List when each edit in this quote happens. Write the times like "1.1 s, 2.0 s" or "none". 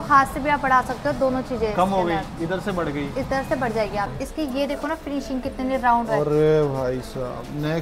4.2 s